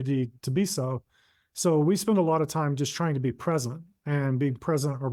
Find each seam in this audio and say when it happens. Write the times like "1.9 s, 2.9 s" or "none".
none